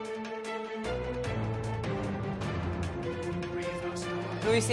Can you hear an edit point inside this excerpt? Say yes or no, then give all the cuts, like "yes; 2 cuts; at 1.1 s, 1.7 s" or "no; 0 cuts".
yes; 2 cuts; at 1.3 s, 2.2 s